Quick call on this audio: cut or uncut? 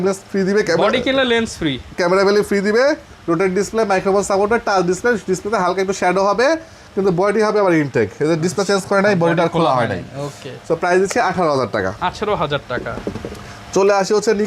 uncut